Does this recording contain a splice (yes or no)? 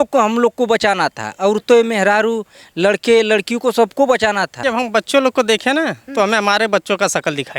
yes